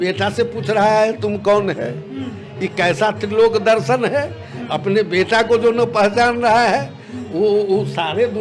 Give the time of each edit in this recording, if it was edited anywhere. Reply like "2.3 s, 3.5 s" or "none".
none